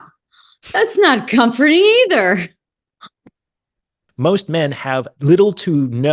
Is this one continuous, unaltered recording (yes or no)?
no